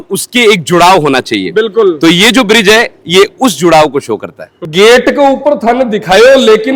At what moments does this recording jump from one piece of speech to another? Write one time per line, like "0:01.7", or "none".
none

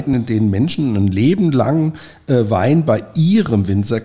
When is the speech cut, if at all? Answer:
none

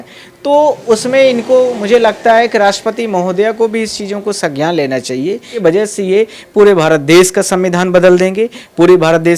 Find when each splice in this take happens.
0:05.6

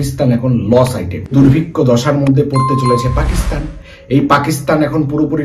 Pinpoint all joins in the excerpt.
0:01.3

